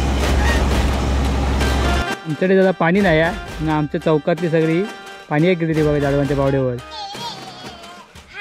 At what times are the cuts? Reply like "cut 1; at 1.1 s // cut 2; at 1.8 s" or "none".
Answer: cut 1; at 2.0 s